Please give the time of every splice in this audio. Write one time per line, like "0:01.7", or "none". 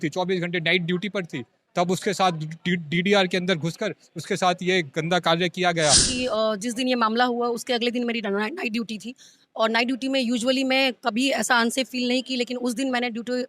0:06.1